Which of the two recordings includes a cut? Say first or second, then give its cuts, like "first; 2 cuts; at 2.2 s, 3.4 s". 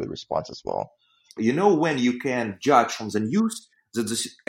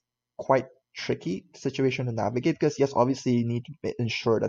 first; 1 cut; at 1.3 s